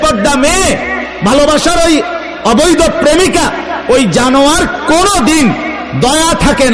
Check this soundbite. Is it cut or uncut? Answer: uncut